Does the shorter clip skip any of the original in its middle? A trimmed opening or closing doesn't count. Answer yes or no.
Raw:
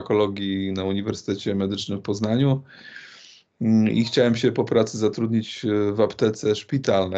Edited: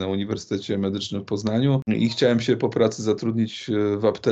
yes